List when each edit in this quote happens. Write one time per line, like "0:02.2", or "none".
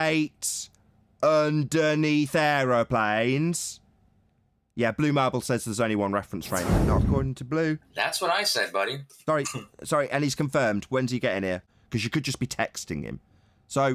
0:06.8
0:11.7